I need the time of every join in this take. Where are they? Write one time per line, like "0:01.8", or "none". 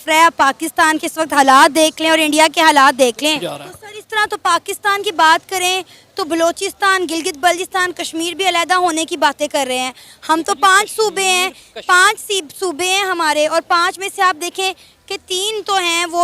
0:03.5